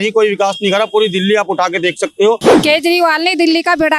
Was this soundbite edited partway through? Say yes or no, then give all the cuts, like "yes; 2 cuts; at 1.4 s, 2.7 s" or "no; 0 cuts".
yes; 1 cut; at 2.5 s